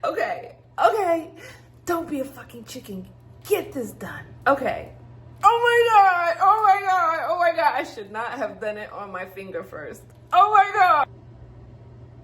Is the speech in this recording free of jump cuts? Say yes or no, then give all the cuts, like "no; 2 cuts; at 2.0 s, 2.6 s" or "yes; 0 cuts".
no; 1 cut; at 11.0 s